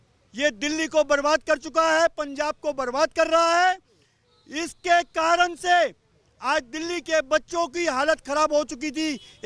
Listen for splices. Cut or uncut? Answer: uncut